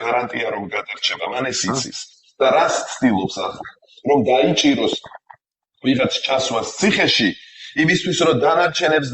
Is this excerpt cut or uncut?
uncut